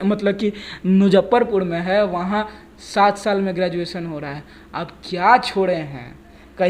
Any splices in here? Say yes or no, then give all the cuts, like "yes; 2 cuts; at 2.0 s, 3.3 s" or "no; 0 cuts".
no; 0 cuts